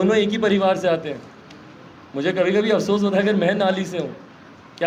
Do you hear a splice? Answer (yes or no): no